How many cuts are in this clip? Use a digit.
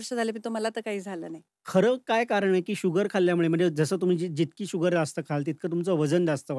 1